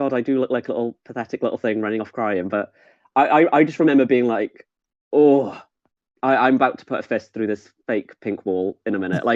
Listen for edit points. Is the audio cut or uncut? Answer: uncut